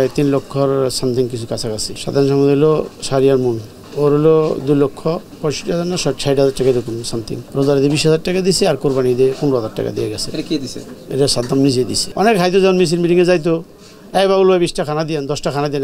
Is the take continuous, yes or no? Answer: no